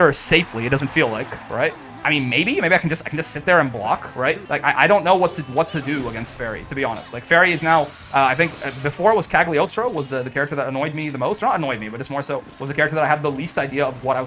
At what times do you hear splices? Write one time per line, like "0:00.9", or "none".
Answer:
0:04.4